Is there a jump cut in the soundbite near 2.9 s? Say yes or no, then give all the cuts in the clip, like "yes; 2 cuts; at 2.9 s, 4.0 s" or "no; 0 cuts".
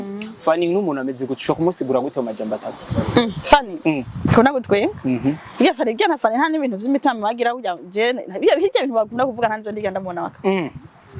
no; 1 cut; at 4.3 s